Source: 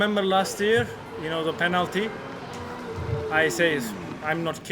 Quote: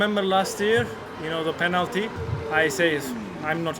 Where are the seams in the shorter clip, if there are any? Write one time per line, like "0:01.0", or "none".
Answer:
0:02.5